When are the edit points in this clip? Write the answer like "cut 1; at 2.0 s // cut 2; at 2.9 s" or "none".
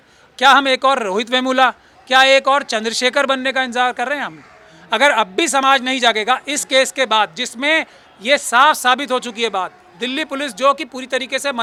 none